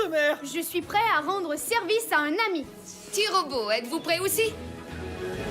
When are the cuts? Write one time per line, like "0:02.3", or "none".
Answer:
0:04.6